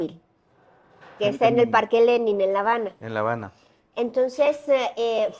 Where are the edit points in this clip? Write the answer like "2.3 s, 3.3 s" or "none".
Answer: none